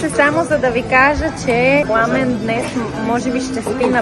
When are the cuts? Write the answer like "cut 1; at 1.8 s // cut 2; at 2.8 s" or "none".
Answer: none